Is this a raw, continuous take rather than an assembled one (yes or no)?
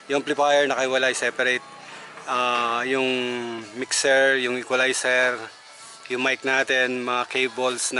yes